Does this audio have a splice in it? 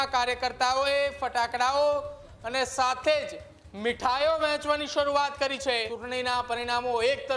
yes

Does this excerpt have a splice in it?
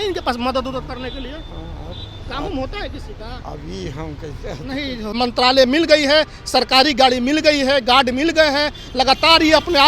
yes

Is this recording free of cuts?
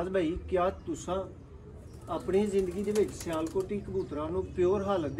yes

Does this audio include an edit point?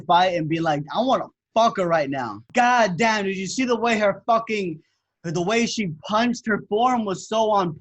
yes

